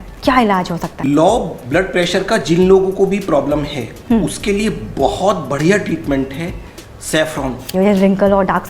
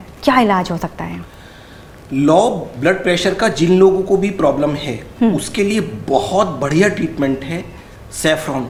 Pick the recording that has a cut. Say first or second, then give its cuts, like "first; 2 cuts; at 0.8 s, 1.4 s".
first; 2 cuts; at 0.9 s, 7.6 s